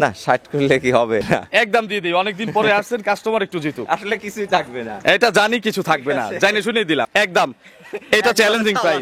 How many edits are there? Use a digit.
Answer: 2